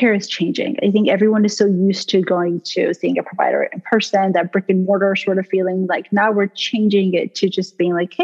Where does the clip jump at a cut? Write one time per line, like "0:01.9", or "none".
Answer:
none